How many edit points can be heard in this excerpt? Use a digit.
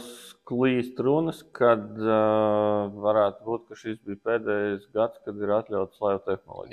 0